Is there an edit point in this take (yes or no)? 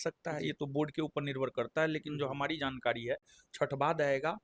no